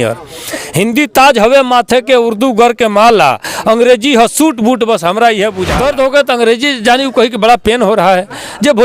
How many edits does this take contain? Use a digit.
1